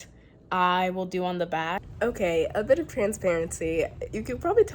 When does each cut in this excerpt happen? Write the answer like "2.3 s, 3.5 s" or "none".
1.9 s